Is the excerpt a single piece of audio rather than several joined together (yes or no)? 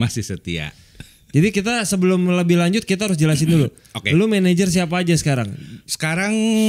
yes